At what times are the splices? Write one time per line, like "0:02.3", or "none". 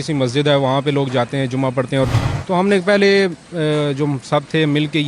0:02.2